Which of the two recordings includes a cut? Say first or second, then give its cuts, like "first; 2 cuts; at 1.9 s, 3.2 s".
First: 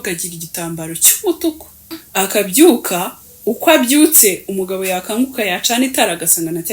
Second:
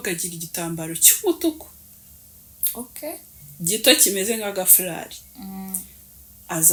first; 1 cut; at 2.0 s